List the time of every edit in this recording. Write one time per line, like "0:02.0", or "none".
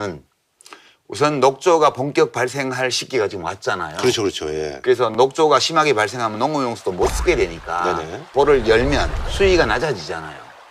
0:04.8